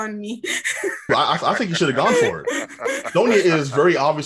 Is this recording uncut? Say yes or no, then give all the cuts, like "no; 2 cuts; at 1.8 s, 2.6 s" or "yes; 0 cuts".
no; 1 cut; at 1.1 s